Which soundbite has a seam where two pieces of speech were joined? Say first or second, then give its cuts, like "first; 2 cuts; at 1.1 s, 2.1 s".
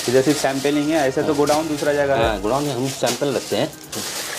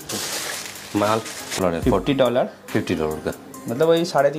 second; 1 cut; at 1.6 s